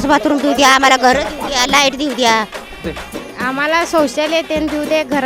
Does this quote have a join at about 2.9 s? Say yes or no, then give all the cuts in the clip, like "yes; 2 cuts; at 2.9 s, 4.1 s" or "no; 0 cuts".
yes; 1 cut; at 2.9 s